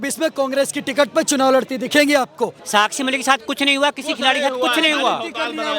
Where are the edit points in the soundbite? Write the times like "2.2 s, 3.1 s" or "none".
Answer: 2.6 s

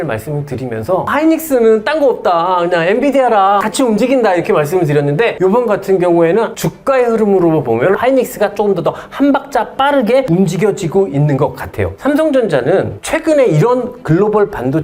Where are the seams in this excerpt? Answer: 6.6 s, 11.9 s

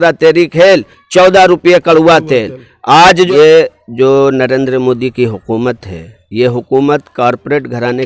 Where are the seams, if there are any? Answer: 3.3 s

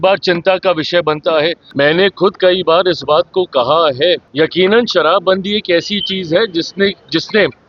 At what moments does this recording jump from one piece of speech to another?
1.6 s, 4.3 s

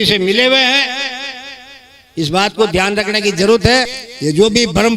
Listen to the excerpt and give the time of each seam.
3.9 s

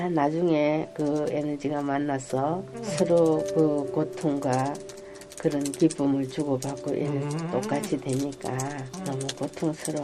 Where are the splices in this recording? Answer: 2.8 s, 8.9 s

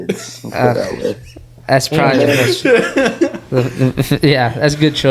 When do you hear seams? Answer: none

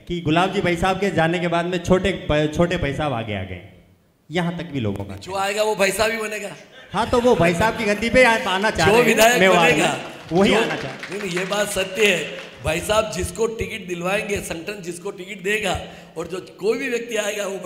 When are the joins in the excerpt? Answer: none

